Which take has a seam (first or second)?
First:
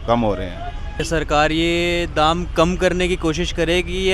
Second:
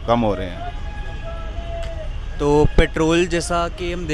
first